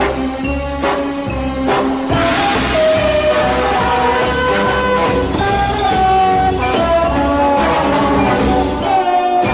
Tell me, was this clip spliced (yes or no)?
yes